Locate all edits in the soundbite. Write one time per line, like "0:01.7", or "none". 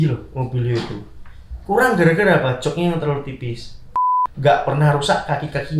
0:04.2